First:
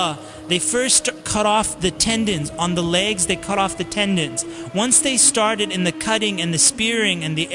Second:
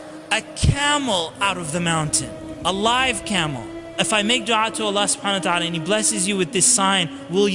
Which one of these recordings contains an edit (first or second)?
second